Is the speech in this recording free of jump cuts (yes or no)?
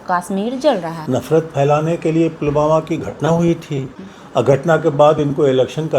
no